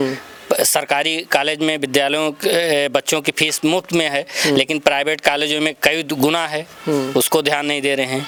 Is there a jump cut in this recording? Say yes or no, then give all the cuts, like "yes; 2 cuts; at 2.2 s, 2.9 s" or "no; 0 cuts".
no; 0 cuts